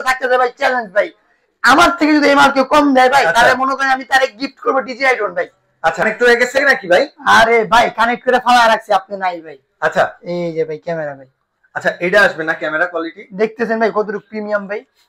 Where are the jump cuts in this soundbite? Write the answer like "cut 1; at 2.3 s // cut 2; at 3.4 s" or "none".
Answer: cut 1; at 6.0 s